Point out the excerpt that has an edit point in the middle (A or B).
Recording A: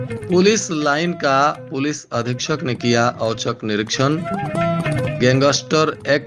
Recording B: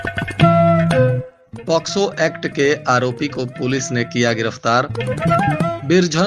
B